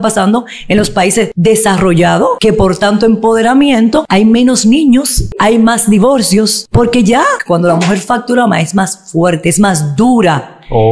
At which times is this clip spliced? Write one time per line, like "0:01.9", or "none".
0:01.3
0:02.4
0:04.1
0:05.3
0:06.6
0:07.4